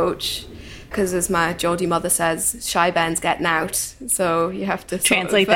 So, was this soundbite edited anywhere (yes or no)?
yes